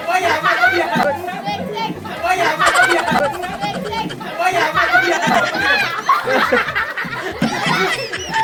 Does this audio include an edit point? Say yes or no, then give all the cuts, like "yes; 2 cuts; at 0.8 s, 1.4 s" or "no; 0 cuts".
no; 0 cuts